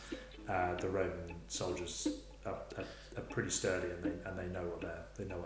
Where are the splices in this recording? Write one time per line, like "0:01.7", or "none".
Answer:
none